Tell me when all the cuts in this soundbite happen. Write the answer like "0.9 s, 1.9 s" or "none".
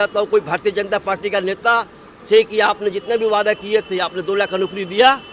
none